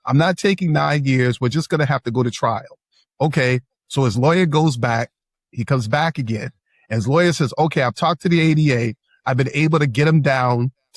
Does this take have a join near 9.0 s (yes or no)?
no